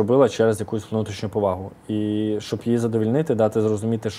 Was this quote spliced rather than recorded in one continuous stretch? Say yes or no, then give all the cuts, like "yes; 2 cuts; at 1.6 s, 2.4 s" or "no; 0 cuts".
no; 0 cuts